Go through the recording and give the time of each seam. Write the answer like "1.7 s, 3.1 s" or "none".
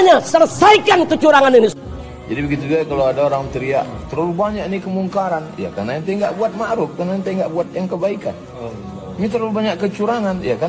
1.7 s